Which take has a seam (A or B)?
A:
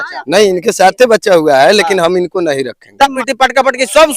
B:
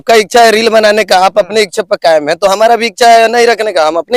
A